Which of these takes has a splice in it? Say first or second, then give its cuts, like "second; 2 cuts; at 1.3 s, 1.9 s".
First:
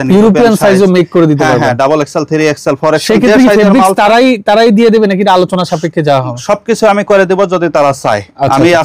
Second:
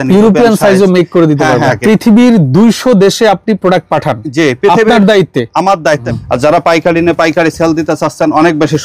second; 2 cuts; at 1.7 s, 6.1 s